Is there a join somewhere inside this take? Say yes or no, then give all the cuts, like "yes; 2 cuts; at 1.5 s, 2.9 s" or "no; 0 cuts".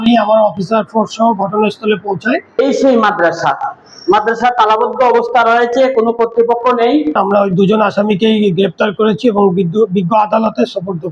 yes; 2 cuts; at 2.6 s, 7.2 s